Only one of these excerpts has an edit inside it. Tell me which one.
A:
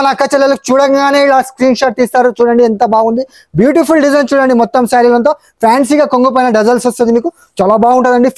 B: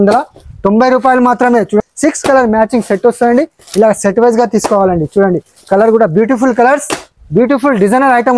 B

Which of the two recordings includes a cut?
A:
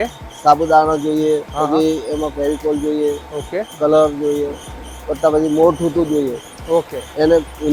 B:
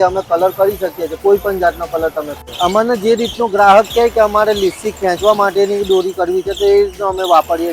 B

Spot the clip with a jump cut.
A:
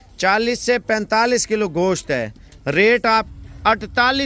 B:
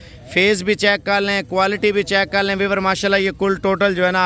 A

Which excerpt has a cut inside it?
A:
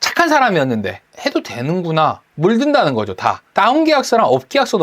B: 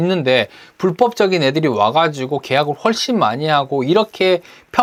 A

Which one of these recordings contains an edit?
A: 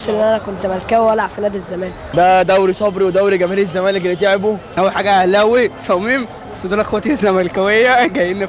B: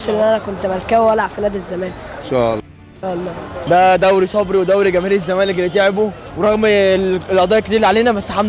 A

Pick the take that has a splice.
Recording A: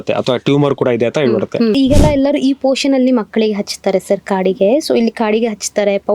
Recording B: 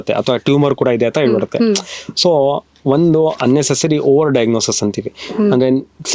A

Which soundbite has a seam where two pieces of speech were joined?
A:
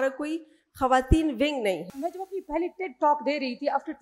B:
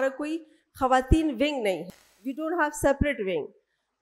A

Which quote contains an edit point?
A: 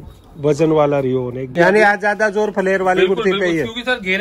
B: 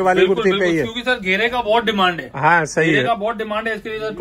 A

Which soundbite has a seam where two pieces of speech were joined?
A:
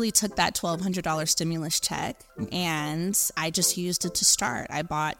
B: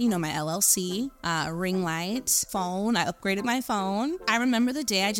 B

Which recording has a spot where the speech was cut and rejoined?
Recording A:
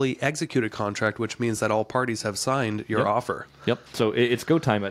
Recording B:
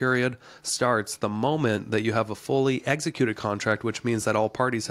A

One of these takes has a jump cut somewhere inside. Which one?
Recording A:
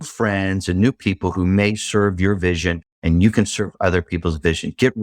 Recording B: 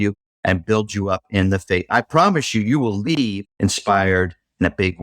B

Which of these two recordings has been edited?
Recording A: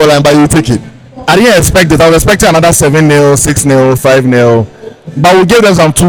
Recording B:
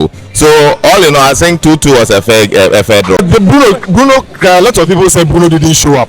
B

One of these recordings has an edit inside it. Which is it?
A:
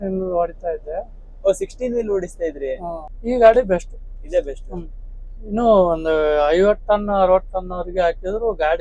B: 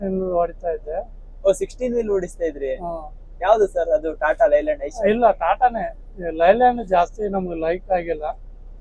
A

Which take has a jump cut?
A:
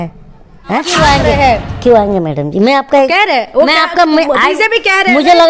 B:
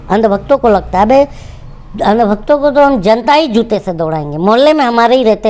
A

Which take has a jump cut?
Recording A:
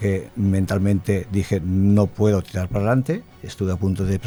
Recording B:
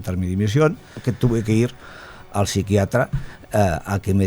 B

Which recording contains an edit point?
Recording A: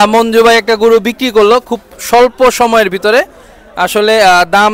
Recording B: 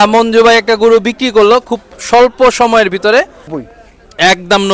B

